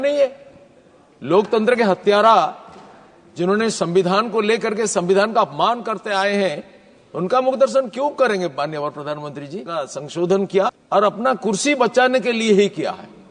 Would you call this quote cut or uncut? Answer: cut